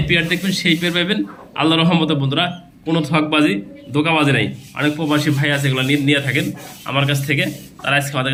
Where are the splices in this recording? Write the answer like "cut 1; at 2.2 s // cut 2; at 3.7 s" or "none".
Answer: none